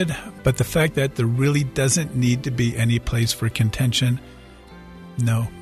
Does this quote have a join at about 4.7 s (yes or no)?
yes